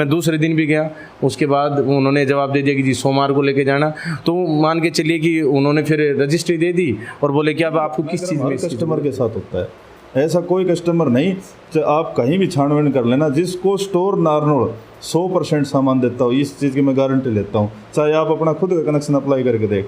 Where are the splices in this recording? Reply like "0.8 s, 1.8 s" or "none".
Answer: 8.5 s